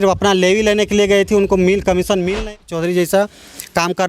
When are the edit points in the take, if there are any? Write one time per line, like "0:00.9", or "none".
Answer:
0:02.4